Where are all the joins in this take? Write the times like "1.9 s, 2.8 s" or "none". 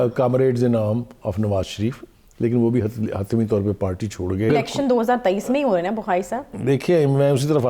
4.5 s